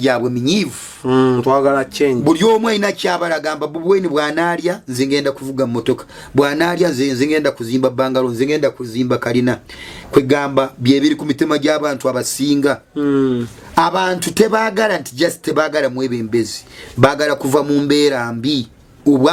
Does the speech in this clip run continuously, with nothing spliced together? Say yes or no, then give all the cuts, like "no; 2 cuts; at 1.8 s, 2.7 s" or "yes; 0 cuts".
yes; 0 cuts